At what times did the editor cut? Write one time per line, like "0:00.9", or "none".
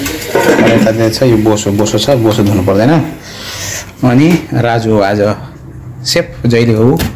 none